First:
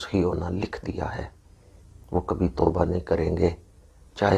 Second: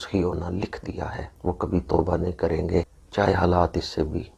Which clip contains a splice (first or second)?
second